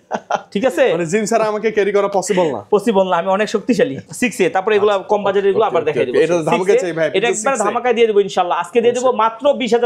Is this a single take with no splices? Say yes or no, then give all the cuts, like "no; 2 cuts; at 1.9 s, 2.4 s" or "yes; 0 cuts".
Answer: yes; 0 cuts